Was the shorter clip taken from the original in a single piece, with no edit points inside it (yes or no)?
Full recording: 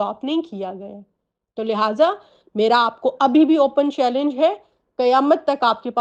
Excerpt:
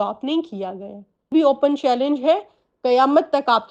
no